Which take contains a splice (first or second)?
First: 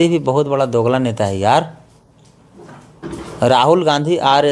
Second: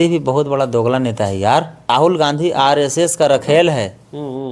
second